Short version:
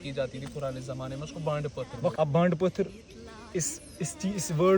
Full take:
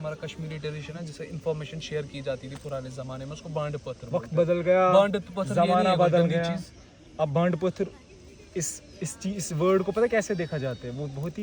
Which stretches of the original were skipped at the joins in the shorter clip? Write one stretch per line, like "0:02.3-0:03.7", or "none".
0:04.2-0:07.2

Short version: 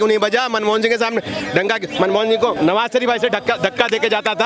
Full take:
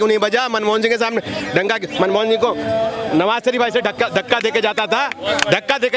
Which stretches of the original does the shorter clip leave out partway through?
0:02.6-0:03.1

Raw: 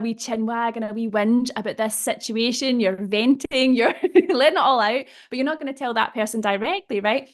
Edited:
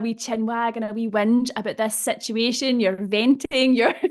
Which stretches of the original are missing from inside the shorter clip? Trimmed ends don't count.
none

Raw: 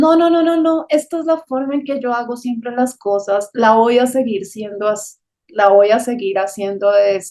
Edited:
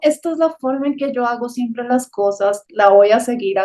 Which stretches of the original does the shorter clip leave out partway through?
0:03.5-0:05.4

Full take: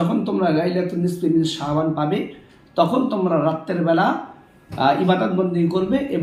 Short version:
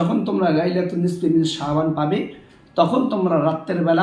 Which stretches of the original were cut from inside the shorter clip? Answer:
none

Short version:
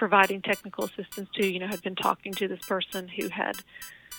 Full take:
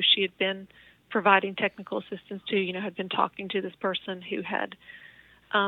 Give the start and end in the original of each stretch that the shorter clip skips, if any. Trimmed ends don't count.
none

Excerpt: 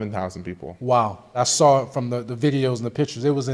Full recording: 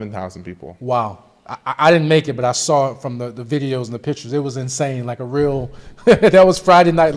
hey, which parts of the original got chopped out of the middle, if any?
0:01.4-0:02.5

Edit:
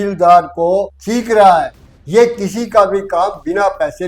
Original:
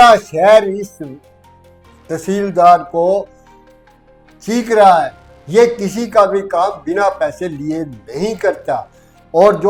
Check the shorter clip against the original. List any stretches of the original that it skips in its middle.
0:03.3-0:04.4

